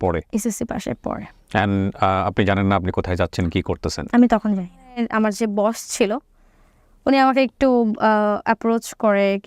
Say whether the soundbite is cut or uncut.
cut